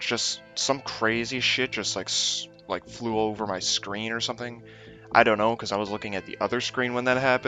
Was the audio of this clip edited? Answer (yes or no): yes